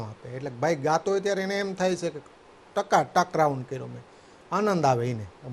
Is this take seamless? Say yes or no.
yes